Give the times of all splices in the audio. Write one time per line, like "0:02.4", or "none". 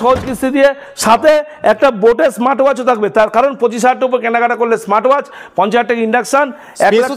none